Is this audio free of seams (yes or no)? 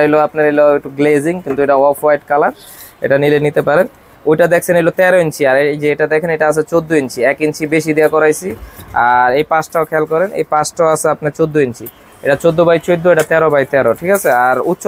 yes